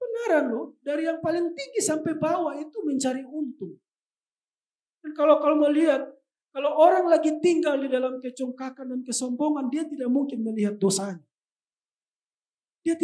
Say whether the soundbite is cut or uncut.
uncut